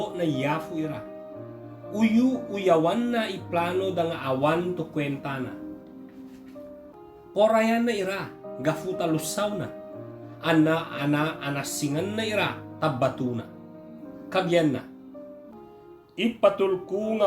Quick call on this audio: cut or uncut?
uncut